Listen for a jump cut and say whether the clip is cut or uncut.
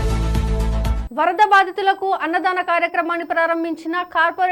cut